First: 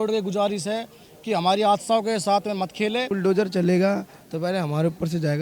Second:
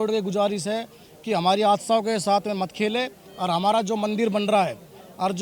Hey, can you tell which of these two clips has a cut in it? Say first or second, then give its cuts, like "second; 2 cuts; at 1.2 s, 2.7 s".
first; 1 cut; at 3.1 s